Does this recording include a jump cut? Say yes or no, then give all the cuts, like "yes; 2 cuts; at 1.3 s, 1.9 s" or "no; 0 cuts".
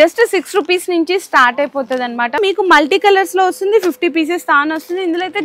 yes; 1 cut; at 2.4 s